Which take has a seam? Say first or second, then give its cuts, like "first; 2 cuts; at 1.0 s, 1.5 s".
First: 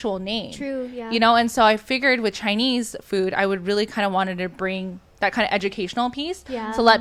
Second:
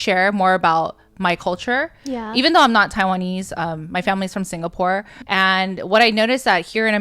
second; 1 cut; at 5.2 s